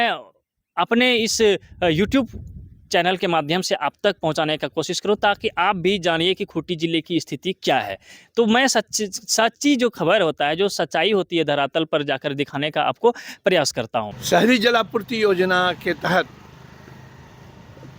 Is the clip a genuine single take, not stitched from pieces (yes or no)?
no